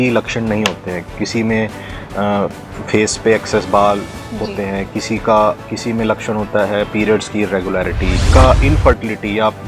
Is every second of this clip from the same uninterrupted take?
no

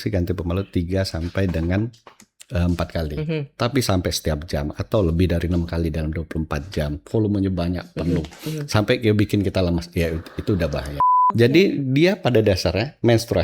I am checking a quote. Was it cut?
yes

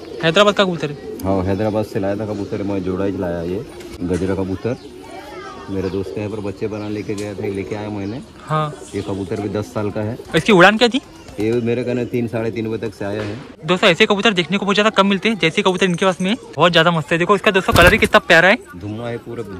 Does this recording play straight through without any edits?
no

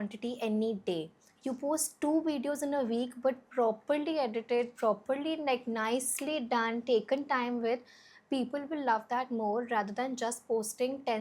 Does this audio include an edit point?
no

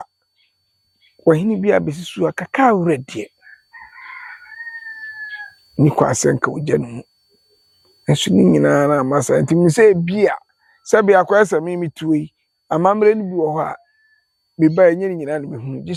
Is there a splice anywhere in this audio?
no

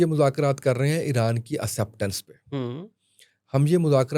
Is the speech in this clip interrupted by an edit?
no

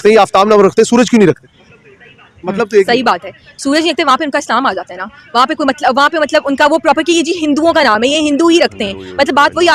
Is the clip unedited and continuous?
yes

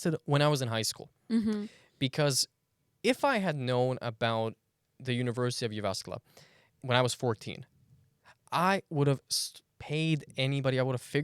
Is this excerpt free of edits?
no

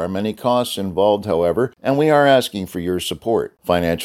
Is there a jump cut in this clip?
yes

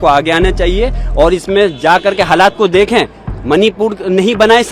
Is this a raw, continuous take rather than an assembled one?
yes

